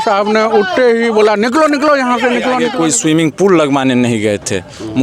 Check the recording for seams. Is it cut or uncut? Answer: cut